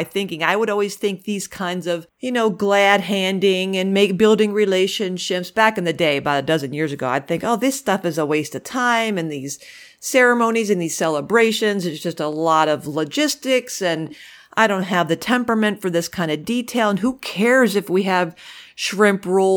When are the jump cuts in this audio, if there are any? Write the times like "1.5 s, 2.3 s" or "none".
2.1 s